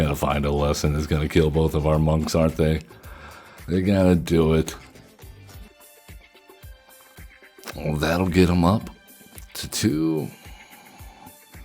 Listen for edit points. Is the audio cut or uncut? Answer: cut